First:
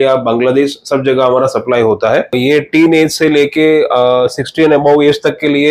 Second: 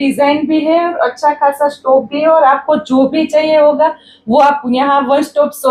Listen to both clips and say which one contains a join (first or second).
first